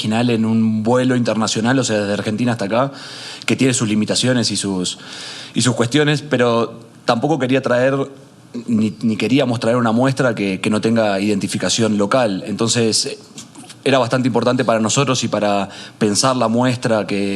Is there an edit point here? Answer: no; 0 cuts

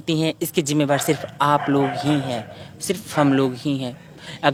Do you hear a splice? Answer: no; 0 cuts

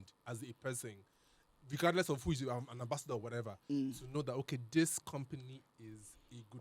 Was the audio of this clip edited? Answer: no; 0 cuts

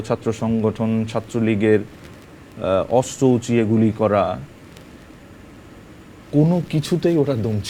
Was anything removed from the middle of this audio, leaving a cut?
no; 0 cuts

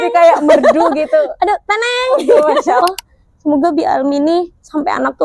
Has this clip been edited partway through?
yes; 1 cut; at 2.8 s

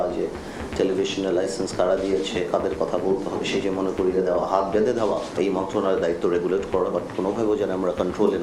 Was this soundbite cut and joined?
no; 0 cuts

